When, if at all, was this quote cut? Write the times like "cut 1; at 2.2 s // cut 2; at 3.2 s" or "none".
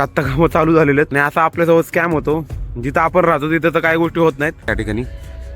cut 1; at 1.1 s // cut 2; at 4.7 s